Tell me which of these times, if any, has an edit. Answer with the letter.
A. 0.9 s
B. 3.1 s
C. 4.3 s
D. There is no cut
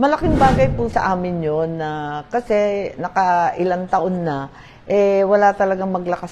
A